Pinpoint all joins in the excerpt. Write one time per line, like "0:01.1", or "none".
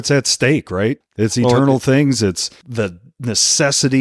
0:01.0
0:02.5

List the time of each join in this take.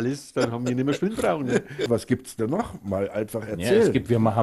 0:01.9

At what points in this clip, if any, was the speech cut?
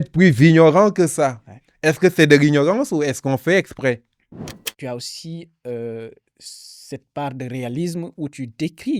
0:04.7

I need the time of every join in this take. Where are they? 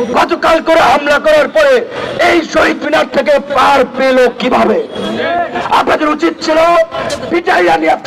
none

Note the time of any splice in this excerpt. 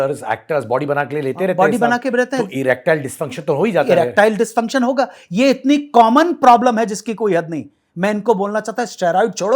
none

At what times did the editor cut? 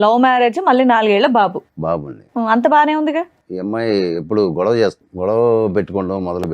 0:03.4
0:05.1

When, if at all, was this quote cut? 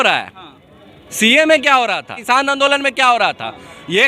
0:02.1

